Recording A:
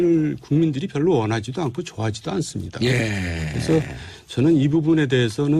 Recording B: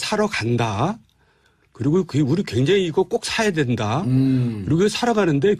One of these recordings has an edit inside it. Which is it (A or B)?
A